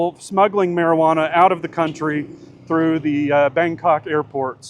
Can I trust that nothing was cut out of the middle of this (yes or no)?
yes